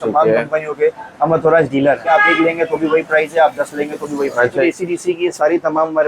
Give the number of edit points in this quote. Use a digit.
2